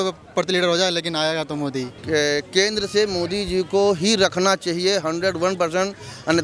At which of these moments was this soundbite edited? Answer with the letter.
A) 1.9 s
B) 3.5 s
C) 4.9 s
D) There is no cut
A